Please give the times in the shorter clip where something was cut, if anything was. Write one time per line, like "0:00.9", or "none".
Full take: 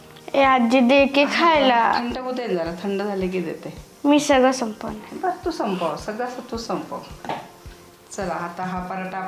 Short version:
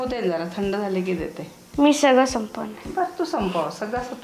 none